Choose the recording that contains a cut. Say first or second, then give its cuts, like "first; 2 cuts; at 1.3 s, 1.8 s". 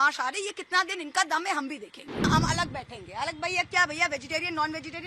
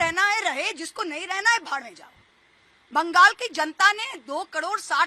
first; 1 cut; at 2.3 s